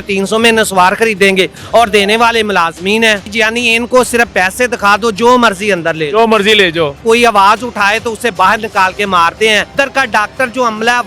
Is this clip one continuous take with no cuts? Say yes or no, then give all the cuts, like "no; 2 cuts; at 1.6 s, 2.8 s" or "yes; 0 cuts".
no; 3 cuts; at 3.3 s, 7.0 s, 9.7 s